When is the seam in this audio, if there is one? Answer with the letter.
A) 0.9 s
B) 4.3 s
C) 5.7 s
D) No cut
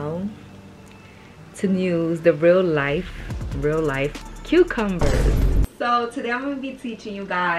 C